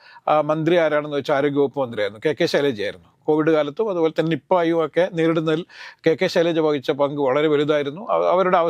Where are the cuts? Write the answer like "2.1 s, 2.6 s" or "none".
none